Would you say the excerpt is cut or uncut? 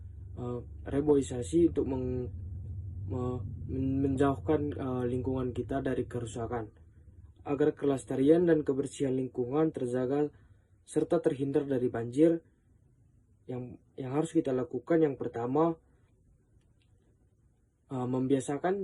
uncut